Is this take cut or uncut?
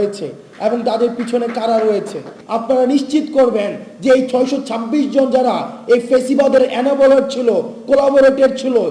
cut